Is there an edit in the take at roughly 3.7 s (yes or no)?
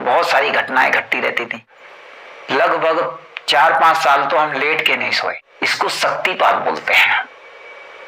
no